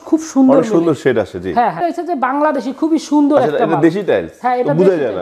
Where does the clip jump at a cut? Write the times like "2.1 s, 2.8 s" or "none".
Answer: 1.8 s